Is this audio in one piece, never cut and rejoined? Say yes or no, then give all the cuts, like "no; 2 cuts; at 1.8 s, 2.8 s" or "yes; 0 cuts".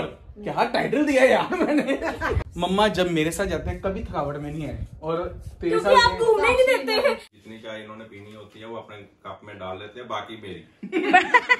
no; 2 cuts; at 2.5 s, 7.3 s